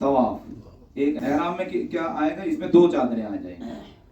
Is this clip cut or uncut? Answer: cut